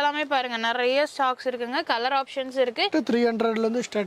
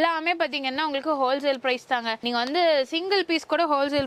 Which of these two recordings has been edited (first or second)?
first